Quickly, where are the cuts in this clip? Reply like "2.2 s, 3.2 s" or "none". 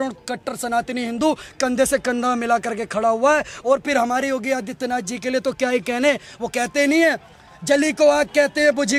none